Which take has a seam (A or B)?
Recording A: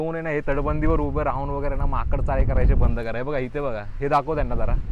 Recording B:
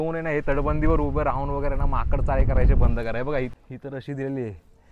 B